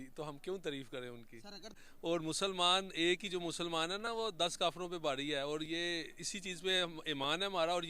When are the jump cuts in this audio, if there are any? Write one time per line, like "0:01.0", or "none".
0:01.9

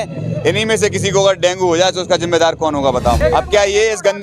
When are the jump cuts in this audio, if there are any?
0:03.2

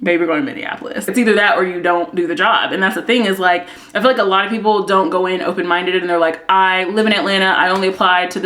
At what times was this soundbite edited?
none

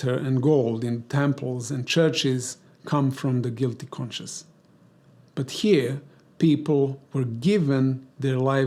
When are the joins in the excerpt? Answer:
none

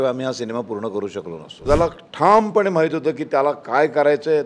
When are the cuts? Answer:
0:01.6

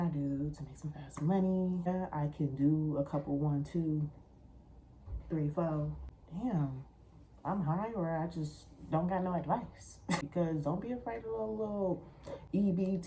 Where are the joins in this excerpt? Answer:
0:01.9
0:06.0
0:10.3

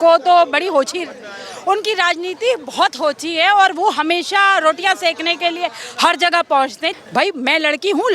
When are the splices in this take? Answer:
0:06.8

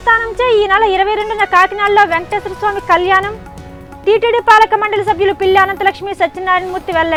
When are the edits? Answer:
none

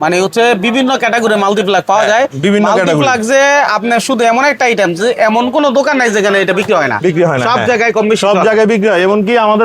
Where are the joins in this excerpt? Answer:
none

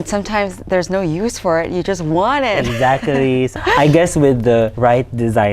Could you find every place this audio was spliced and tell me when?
0:03.6
0:04.7

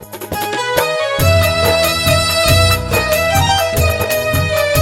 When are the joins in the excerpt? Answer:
0:03.9

